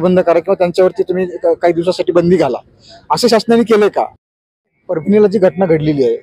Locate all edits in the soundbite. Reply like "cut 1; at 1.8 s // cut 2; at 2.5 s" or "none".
cut 1; at 4.4 s